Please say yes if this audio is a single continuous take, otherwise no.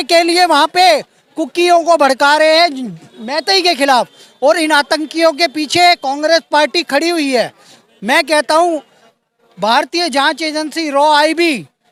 yes